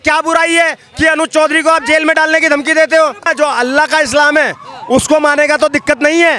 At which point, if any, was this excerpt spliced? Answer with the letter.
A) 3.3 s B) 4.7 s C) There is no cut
A